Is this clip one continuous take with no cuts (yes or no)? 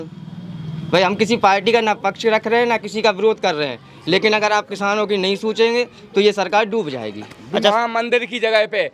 no